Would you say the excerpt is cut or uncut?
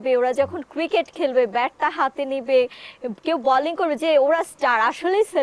uncut